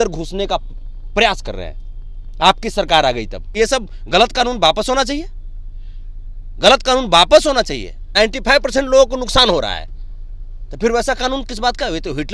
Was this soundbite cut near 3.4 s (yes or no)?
yes